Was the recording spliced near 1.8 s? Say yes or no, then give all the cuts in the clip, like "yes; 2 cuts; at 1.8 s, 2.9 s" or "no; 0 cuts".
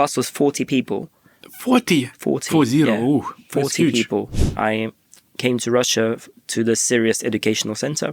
no; 1 cut; at 4.4 s